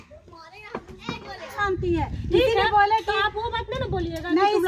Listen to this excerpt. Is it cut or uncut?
cut